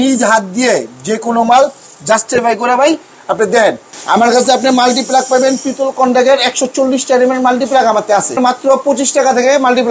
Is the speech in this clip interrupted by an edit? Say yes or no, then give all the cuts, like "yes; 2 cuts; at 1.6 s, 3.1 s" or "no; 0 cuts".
yes; 2 cuts; at 3.9 s, 8.4 s